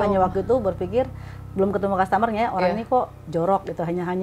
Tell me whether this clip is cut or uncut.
uncut